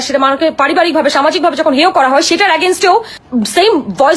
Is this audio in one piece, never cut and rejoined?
no; 1 cut; at 3.2 s

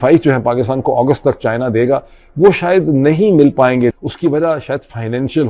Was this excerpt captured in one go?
no; 1 cut; at 3.9 s

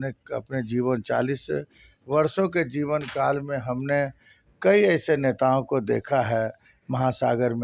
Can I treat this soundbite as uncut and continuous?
yes; 0 cuts

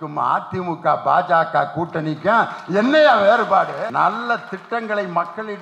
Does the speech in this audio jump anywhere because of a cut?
yes; 1 cut; at 3.9 s

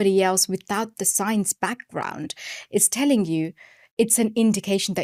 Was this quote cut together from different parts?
no; 0 cuts

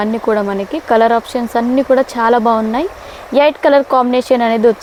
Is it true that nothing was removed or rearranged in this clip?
yes; 0 cuts

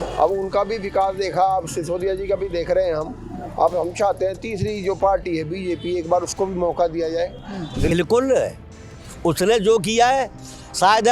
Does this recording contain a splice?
yes; 1 cut; at 7.9 s

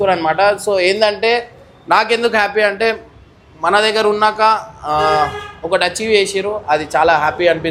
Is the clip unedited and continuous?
yes; 0 cuts

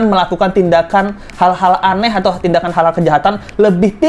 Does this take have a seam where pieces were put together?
no; 0 cuts

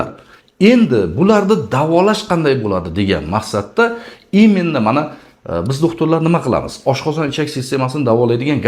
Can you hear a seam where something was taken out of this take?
no; 0 cuts

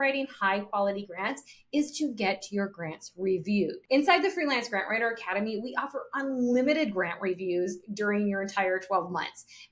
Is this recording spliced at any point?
yes; 1 cut; at 3.8 s

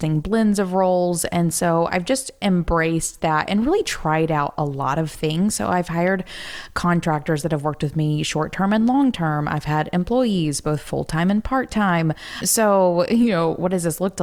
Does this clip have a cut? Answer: yes; 1 cut; at 12.4 s

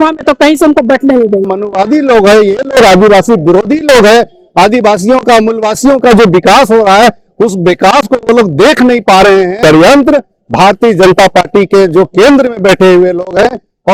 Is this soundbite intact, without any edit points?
no; 2 cuts; at 1.5 s, 9.6 s

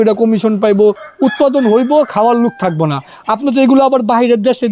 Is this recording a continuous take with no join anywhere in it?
no; 1 cut; at 1.1 s

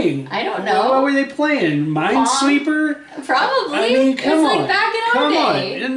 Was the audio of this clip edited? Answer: no; 0 cuts

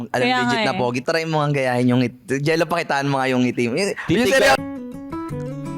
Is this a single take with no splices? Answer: no; 2 cuts; at 1.0 s, 4.7 s

